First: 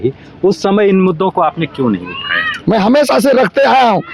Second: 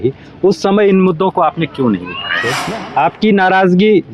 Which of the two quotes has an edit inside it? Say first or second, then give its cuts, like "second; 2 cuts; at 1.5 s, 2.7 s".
second; 1 cut; at 2.5 s